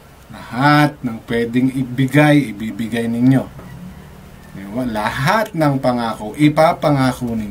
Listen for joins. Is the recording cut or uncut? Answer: uncut